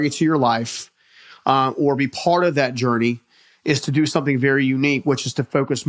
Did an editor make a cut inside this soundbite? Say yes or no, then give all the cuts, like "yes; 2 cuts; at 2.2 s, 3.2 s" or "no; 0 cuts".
no; 0 cuts